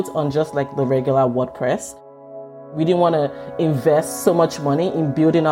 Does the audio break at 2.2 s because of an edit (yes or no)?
yes